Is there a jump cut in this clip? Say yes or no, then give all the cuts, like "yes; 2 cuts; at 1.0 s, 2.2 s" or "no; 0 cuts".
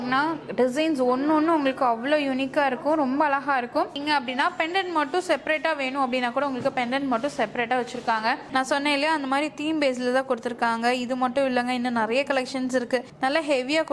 yes; 3 cuts; at 3.9 s, 8.5 s, 13.1 s